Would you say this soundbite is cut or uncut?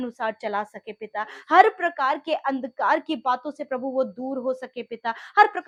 uncut